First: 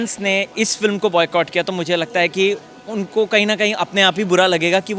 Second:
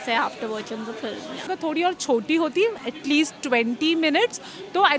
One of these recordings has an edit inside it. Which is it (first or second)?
second